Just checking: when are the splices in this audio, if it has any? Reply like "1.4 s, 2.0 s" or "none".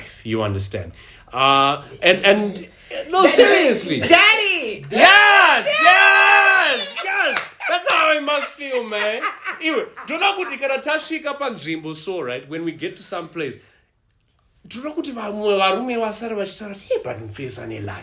none